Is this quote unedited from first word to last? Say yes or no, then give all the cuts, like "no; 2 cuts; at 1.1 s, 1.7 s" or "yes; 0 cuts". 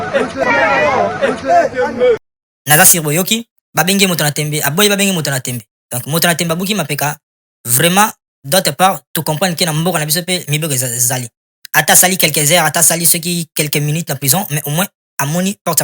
no; 1 cut; at 0.9 s